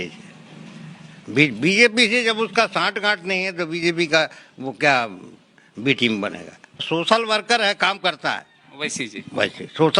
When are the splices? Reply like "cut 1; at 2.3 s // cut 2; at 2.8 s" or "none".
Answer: cut 1; at 6.8 s